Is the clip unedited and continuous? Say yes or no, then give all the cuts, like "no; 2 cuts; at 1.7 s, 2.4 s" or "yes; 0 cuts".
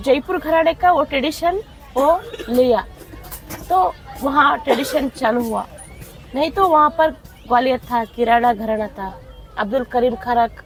yes; 0 cuts